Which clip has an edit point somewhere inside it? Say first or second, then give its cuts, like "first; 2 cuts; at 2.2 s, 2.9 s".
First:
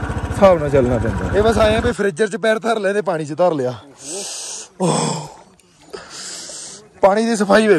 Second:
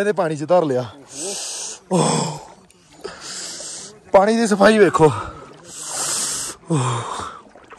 first; 1 cut; at 1.2 s